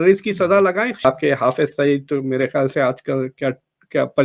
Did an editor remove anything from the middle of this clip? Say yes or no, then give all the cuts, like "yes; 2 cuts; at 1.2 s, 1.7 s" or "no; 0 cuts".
yes; 1 cut; at 1.0 s